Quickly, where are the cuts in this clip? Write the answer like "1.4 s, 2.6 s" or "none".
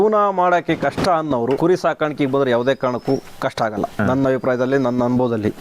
1.6 s, 3.8 s